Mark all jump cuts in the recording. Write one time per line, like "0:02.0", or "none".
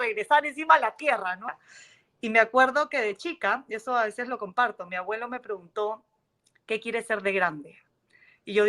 0:01.5